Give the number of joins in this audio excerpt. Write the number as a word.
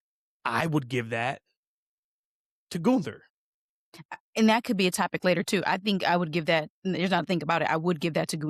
zero